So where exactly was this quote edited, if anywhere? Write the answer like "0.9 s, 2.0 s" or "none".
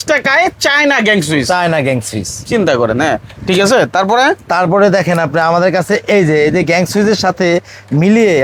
none